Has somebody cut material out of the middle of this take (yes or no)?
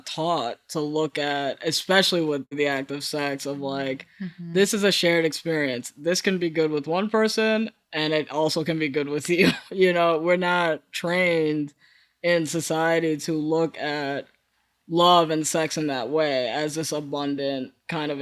yes